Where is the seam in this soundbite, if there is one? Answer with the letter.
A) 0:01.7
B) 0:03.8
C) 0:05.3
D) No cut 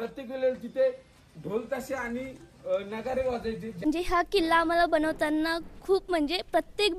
B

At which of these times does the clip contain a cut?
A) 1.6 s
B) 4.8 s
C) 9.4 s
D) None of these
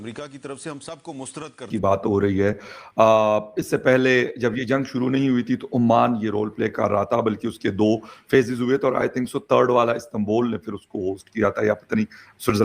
A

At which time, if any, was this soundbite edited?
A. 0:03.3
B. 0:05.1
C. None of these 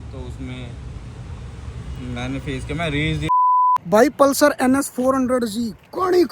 A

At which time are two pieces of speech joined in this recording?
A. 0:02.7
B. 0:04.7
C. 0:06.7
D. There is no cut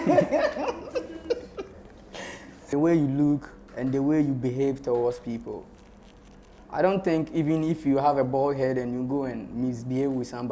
A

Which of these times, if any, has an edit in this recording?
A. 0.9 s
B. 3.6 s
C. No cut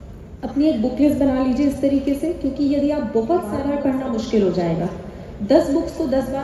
B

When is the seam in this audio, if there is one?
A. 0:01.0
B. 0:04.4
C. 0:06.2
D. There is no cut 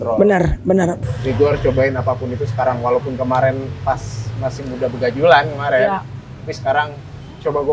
A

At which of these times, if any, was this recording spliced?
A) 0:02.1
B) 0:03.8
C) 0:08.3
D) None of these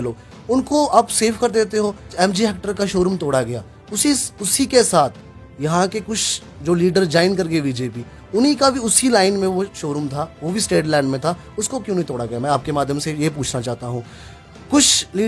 A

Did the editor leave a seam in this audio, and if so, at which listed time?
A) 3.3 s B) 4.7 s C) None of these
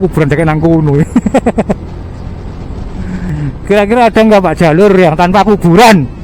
A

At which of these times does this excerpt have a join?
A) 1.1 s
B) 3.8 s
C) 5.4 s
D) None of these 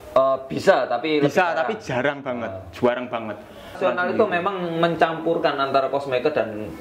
B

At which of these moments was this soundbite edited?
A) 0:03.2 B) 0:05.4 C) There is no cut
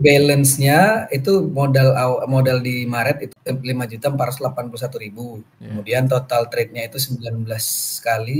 A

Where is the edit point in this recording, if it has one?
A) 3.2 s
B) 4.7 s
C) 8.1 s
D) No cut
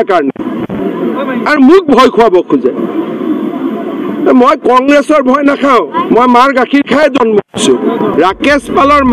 C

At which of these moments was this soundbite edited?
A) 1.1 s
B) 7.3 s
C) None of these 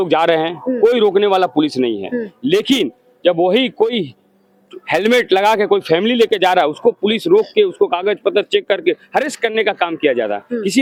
C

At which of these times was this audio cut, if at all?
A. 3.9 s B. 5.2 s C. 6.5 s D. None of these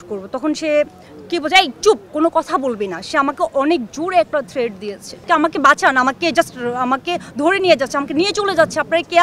B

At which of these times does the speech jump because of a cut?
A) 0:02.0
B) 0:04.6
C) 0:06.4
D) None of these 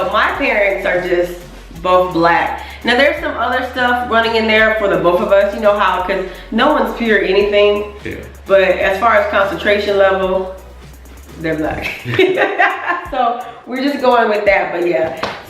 B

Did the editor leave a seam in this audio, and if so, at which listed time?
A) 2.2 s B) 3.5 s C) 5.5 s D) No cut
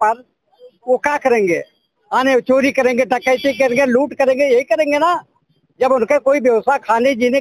D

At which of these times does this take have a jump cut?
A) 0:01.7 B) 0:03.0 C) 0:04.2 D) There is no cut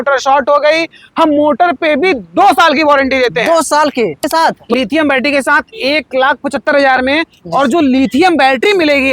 C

